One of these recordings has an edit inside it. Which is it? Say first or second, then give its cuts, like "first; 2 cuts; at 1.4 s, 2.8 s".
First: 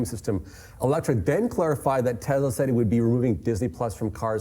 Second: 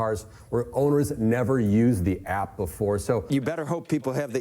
second; 1 cut; at 3.2 s